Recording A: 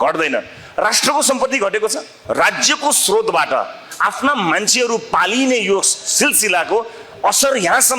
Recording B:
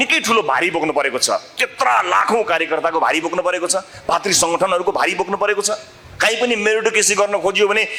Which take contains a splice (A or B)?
A